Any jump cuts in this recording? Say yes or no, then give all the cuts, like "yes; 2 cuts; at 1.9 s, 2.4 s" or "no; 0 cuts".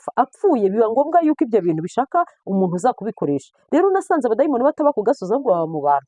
no; 0 cuts